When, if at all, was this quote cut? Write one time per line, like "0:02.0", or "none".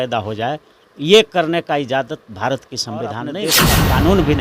0:03.4